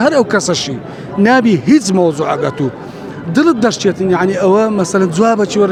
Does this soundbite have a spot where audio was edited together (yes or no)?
no